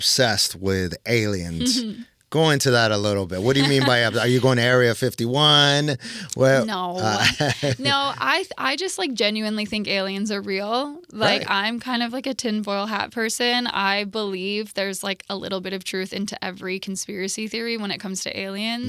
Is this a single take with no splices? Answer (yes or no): yes